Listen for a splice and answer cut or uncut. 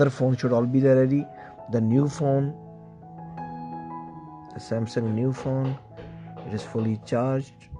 uncut